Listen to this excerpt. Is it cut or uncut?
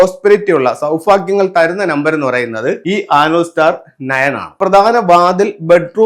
cut